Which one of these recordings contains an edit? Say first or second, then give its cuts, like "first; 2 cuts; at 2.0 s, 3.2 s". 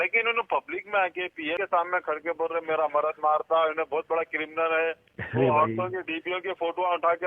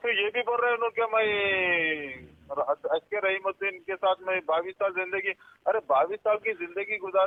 first; 1 cut; at 1.6 s